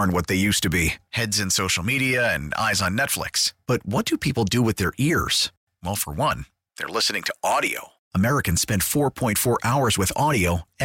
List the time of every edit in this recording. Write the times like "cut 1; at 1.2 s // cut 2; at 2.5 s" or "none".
none

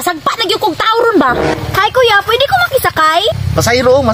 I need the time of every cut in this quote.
cut 1; at 1.5 s // cut 2; at 3.3 s

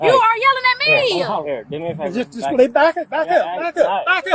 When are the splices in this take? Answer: none

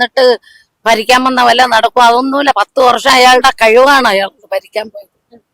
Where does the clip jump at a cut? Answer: none

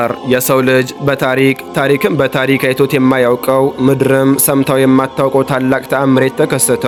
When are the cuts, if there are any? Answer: none

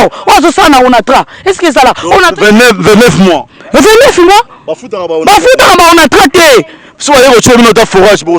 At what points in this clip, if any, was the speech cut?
cut 1; at 6.9 s

